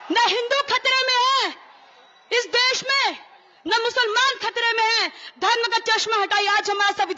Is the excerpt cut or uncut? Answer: uncut